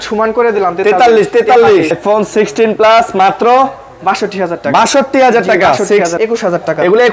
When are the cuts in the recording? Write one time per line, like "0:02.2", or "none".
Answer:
0:02.0
0:06.1